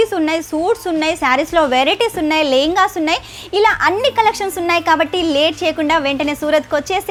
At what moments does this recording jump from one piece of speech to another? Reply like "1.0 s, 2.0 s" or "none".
none